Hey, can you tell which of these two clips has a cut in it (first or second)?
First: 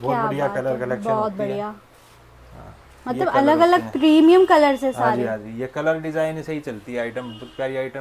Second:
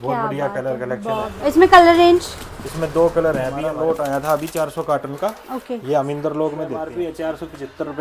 second